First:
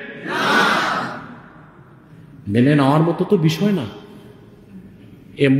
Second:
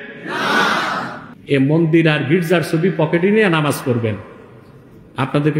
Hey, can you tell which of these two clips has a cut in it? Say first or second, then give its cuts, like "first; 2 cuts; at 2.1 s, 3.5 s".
second; 1 cut; at 1.3 s